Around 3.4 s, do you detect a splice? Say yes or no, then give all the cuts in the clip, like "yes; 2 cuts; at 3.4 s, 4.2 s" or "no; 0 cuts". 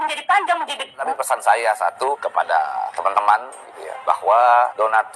no; 1 cut; at 1.1 s